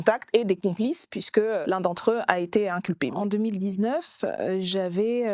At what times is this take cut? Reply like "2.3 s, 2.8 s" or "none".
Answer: 1.6 s, 3.1 s